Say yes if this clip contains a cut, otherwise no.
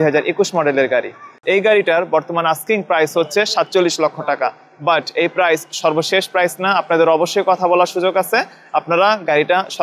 yes